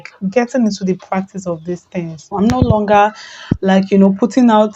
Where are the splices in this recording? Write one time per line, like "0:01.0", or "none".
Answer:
none